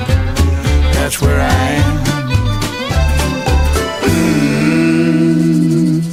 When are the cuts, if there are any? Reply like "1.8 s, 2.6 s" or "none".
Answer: none